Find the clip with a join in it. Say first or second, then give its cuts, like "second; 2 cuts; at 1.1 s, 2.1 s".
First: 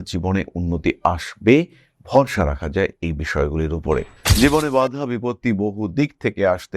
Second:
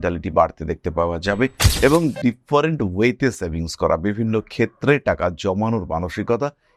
first; 1 cut; at 4.1 s